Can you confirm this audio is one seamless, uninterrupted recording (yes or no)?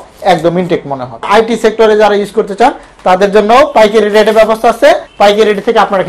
no